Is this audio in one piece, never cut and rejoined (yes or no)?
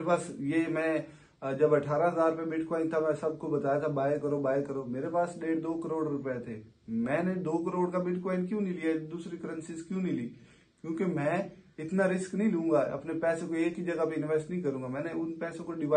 yes